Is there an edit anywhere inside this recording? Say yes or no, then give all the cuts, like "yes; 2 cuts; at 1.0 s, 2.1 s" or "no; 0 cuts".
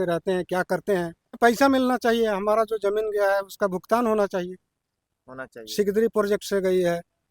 yes; 1 cut; at 1.4 s